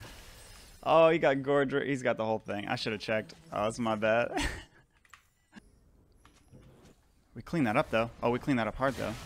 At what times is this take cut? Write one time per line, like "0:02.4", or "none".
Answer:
0:05.6